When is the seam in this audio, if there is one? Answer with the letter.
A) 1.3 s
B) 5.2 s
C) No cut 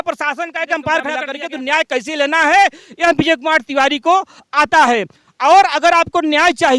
A